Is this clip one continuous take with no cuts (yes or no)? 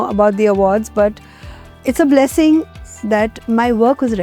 no